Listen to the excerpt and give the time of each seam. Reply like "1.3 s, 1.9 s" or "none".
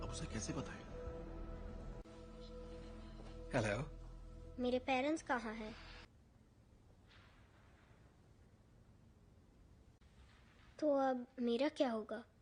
6.1 s